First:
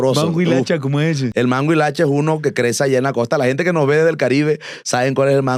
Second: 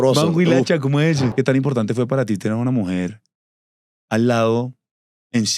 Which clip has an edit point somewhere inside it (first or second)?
second